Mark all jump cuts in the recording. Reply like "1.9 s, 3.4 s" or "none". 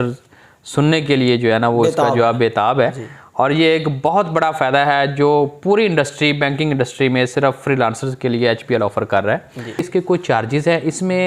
9.9 s